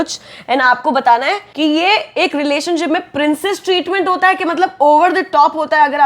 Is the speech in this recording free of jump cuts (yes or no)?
no